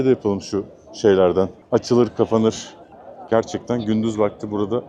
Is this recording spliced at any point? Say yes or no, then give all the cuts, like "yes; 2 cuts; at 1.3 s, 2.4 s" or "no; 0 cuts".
no; 0 cuts